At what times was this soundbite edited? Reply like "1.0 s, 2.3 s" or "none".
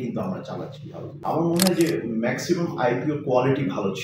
1.1 s